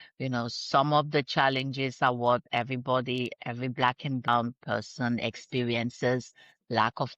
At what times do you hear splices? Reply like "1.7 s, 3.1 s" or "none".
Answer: 4.3 s